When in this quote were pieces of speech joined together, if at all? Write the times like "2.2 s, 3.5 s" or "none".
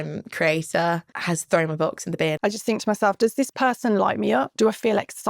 1.1 s, 2.4 s, 4.5 s